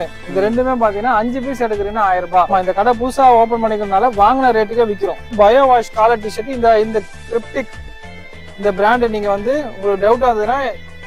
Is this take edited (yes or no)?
yes